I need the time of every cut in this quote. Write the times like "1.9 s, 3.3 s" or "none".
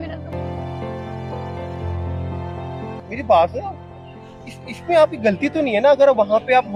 none